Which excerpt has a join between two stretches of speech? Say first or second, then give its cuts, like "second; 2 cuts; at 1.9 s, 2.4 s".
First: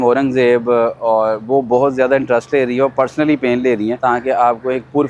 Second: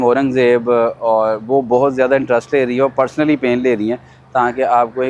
first; 1 cut; at 4.0 s